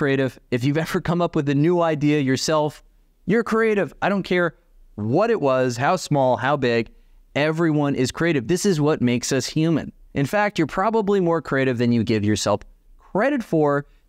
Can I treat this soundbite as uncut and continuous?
yes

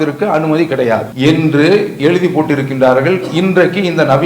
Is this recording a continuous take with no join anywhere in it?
no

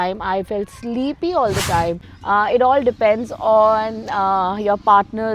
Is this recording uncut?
no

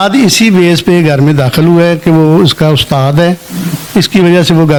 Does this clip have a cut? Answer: no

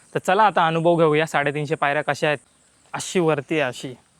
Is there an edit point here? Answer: yes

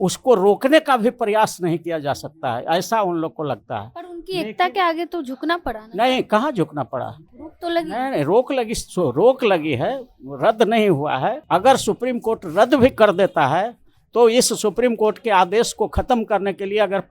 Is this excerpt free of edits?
no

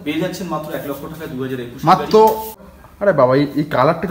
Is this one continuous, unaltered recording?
no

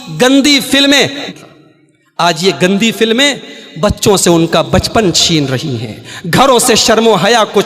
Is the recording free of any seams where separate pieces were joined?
no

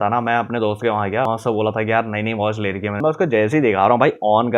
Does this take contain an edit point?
yes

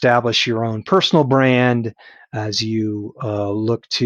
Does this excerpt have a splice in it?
no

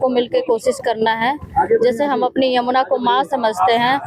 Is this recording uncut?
yes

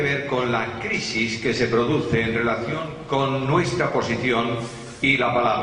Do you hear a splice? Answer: yes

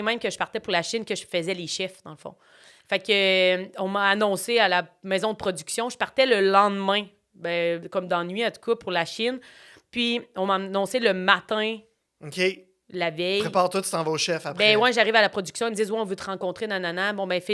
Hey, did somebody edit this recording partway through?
no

